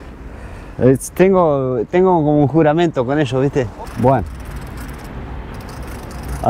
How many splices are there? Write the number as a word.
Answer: one